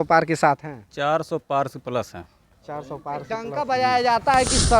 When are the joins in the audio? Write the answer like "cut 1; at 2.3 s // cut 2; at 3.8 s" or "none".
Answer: cut 1; at 3.5 s